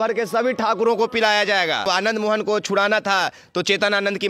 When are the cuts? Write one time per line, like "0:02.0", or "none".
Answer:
0:01.8